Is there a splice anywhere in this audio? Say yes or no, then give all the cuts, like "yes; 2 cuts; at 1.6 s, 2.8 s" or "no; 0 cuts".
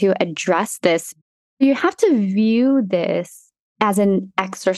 yes; 1 cut; at 1.1 s